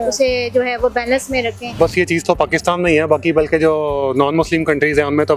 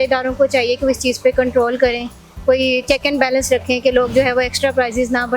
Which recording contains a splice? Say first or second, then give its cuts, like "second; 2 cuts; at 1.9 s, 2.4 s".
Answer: first; 1 cut; at 1.8 s